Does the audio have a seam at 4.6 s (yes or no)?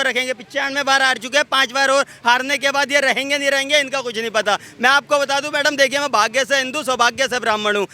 no